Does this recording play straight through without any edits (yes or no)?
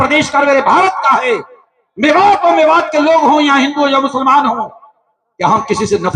yes